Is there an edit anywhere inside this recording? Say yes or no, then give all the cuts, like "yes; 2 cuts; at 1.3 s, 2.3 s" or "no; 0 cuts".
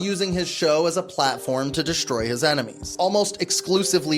yes; 1 cut; at 2.9 s